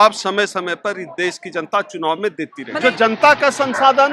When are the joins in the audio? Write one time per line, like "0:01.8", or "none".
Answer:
0:02.6